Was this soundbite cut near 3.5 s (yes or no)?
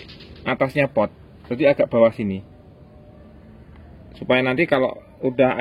no